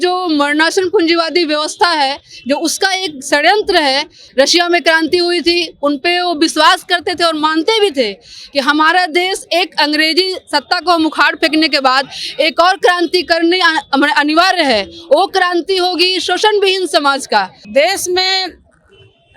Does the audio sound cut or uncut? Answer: cut